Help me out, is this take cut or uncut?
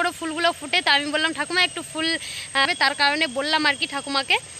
cut